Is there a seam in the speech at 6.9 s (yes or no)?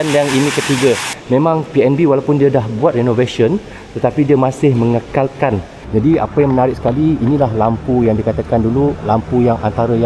no